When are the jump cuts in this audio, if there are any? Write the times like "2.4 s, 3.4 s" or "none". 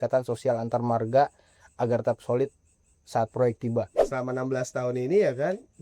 4.0 s